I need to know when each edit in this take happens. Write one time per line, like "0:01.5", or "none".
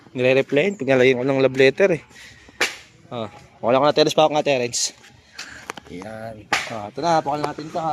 none

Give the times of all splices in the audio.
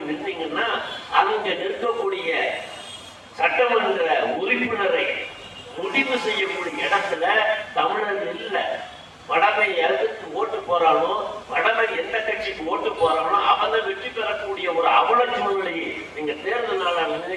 none

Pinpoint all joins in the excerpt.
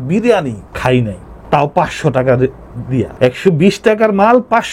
none

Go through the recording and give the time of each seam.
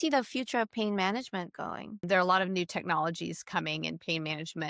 0:01.9

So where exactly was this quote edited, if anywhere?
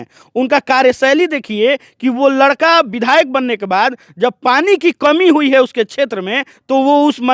none

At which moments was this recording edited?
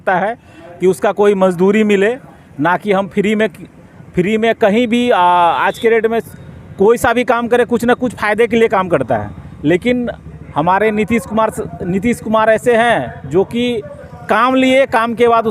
none

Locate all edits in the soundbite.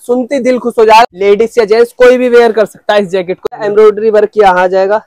0:01.0
0:03.5

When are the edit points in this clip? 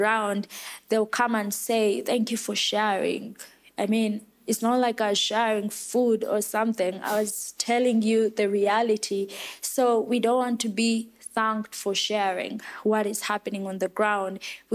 none

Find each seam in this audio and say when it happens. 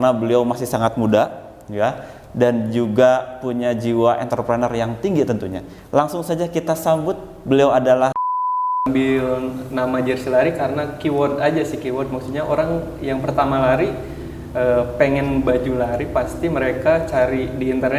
0:08.8

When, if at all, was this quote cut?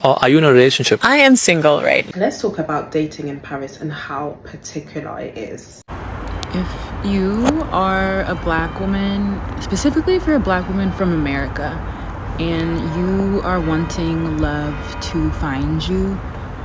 0:02.1
0:05.8

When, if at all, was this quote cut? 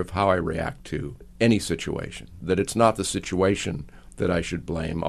0:01.2
0:02.4

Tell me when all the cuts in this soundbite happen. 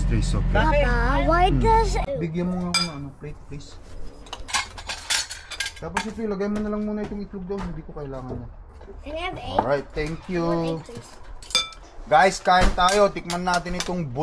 0:02.0
0:04.5

